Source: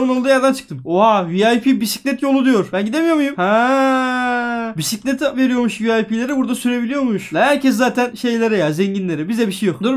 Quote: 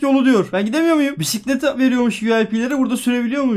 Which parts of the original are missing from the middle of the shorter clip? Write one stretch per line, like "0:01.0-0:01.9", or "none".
0:03.3-0:04.7